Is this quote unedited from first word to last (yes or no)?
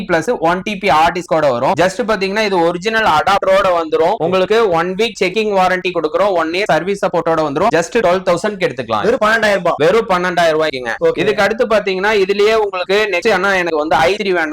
yes